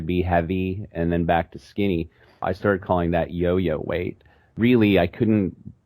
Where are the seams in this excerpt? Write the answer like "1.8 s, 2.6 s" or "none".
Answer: 2.4 s, 4.5 s